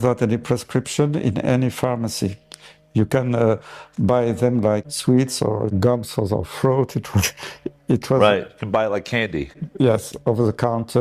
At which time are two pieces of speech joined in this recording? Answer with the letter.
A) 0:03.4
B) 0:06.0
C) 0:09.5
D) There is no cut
D